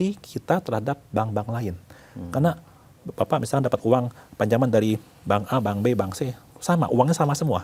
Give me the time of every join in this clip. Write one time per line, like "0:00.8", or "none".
none